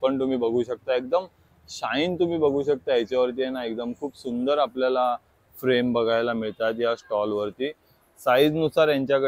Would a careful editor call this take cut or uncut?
uncut